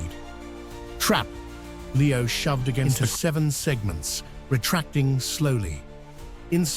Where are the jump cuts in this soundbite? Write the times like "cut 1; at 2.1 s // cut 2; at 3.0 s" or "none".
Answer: cut 1; at 2.8 s